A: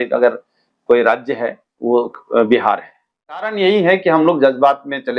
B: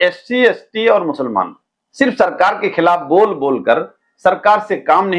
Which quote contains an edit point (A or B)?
A